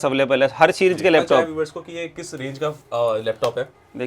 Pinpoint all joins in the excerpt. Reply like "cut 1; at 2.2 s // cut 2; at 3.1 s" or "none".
cut 1; at 1.4 s